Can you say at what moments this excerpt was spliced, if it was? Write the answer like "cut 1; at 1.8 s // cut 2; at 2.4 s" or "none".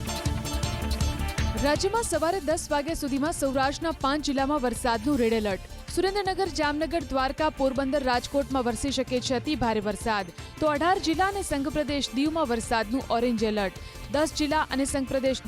cut 1; at 1.4 s